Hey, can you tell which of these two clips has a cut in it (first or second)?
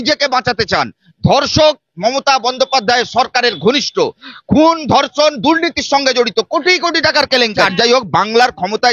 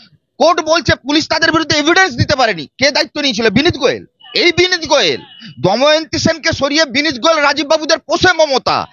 first